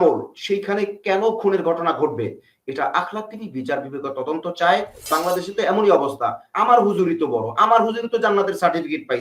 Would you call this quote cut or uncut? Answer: cut